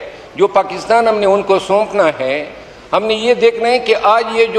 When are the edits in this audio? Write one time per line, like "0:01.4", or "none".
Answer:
none